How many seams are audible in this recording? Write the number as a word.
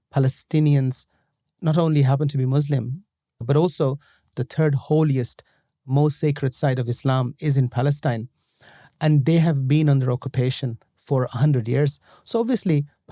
two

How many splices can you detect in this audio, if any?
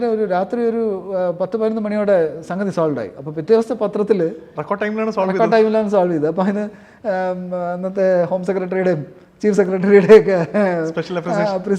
zero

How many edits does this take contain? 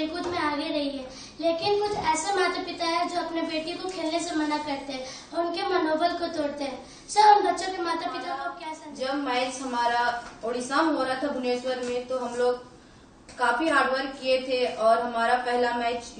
one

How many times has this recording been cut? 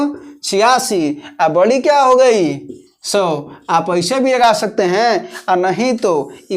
zero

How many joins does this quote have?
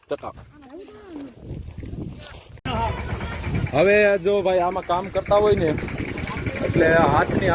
one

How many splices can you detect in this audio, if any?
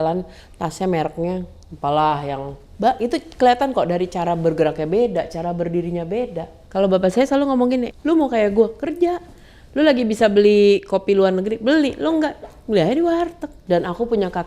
three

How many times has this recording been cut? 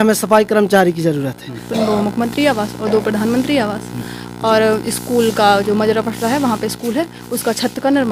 one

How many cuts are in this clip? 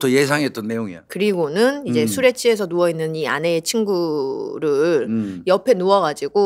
one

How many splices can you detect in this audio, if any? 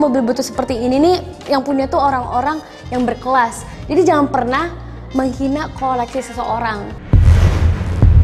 three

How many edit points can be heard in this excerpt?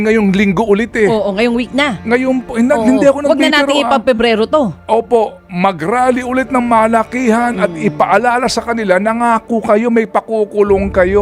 zero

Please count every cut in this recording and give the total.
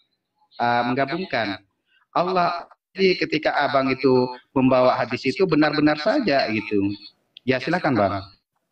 one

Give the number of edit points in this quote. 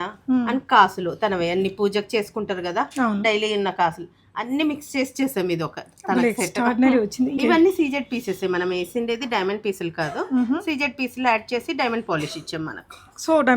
one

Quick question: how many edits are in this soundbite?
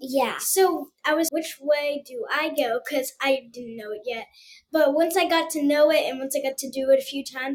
zero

